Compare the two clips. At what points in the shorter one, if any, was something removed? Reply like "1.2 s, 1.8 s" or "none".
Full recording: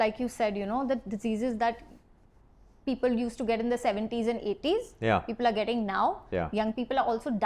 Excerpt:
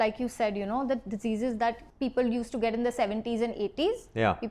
1.9 s